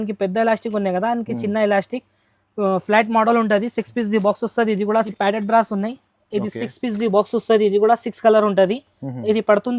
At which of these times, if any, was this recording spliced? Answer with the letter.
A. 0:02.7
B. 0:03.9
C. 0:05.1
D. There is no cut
C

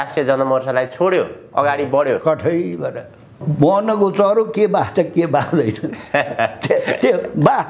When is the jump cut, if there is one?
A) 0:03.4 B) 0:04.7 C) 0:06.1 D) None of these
A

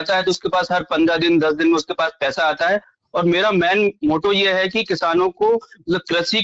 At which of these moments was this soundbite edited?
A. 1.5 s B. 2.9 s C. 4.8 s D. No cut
D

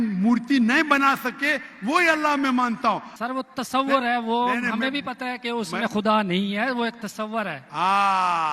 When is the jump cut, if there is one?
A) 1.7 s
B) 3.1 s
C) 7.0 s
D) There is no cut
B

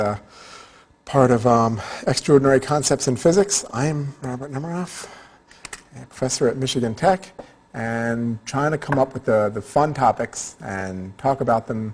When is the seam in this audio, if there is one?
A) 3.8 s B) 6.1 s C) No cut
A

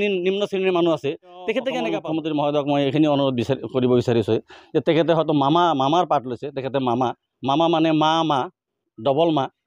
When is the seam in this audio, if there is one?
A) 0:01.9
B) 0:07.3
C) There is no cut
A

